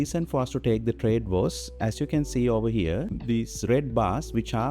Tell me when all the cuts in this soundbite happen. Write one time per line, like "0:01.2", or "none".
none